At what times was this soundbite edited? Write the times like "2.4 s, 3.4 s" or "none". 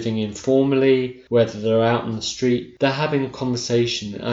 1.2 s, 2.7 s